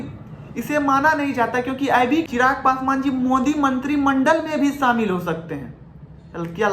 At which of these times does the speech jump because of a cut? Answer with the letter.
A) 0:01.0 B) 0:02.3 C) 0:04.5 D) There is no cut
B